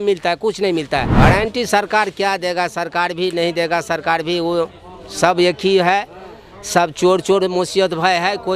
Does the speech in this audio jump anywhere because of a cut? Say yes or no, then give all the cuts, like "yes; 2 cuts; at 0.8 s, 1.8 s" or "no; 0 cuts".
yes; 1 cut; at 1.1 s